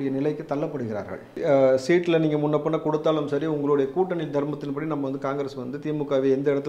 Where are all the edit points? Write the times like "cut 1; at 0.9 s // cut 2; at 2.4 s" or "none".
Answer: cut 1; at 1.4 s

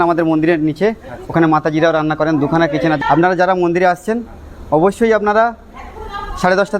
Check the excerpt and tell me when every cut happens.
cut 1; at 3.0 s

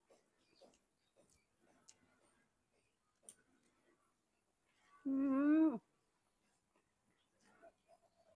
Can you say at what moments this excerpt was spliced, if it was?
none

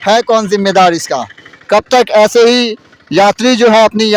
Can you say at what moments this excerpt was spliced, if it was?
none

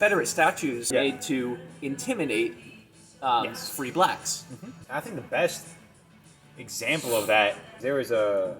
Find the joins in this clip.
cut 1; at 0.9 s // cut 2; at 4.8 s // cut 3; at 7.7 s

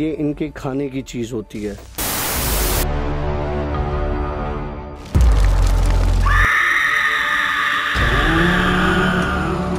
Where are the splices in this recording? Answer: none

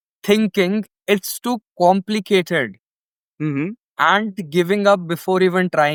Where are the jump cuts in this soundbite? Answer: none

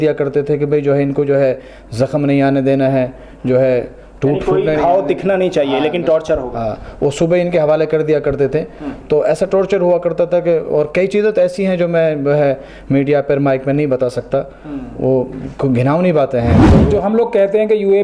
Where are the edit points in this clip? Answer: cut 1; at 16.9 s

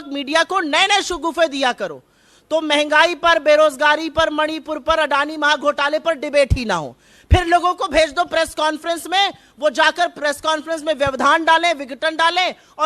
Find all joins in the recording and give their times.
none

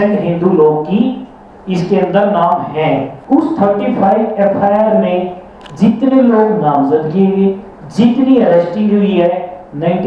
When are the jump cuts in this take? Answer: cut 1; at 3.1 s

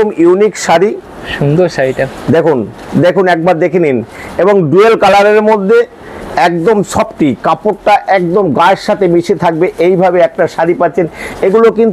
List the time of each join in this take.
none

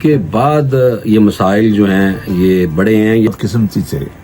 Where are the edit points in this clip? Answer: cut 1; at 3.3 s

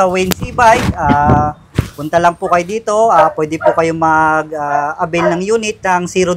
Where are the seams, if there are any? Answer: none

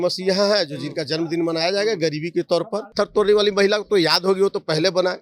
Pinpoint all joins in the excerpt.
cut 1; at 2.9 s

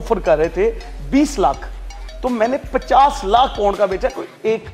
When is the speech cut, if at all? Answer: none

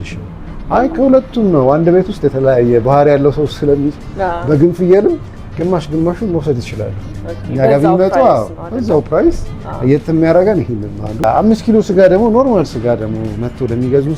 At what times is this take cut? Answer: cut 1; at 11.2 s

